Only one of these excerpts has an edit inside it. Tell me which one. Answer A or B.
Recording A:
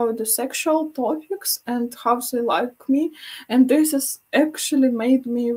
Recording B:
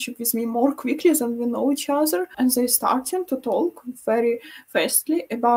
B